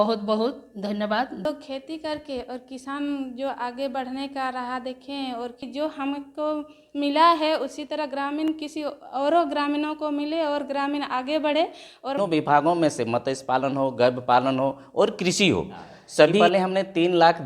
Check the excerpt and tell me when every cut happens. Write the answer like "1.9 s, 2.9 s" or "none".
1.4 s, 5.6 s, 12.2 s, 16.4 s

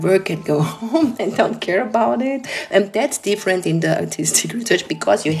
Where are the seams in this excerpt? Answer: 2.5 s

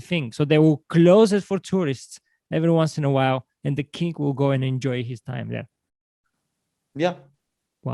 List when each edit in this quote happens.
none

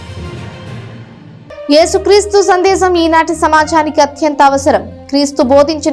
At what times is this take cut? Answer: 1.1 s

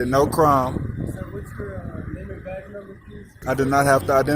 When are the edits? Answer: 3.4 s

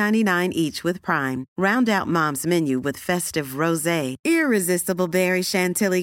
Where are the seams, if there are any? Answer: none

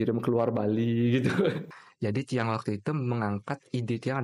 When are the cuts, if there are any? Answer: 1.7 s

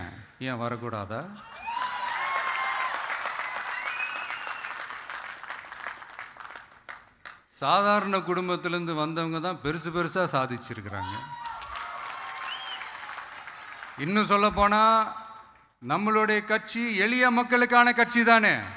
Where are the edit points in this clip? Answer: none

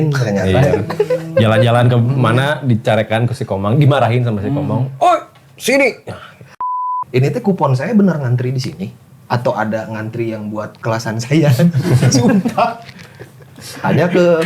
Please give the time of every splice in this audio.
6.5 s

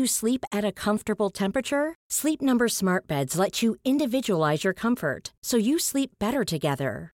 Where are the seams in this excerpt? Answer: none

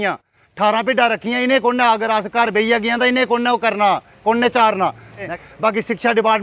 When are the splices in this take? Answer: 5.3 s

